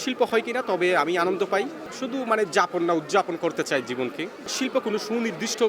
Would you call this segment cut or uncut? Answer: cut